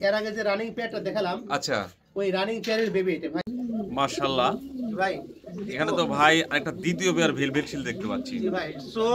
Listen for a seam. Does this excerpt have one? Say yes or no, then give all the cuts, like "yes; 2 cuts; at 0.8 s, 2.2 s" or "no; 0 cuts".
yes; 1 cut; at 3.4 s